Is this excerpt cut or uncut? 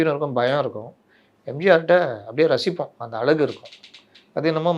uncut